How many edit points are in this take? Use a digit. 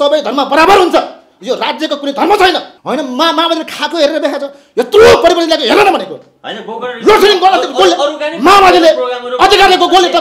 1